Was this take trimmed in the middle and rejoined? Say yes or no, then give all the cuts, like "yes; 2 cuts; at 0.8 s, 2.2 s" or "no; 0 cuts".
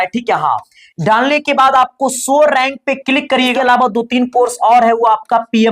yes; 1 cut; at 3.5 s